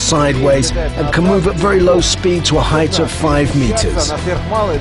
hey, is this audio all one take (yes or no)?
yes